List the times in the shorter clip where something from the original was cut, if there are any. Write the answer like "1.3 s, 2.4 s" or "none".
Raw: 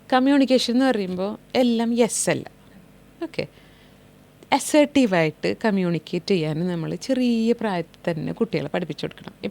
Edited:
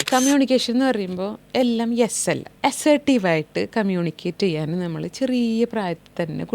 2.5 s